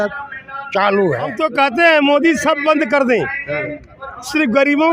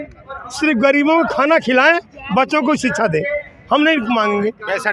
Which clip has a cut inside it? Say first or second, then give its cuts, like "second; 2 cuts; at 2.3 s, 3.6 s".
first; 1 cut; at 1.3 s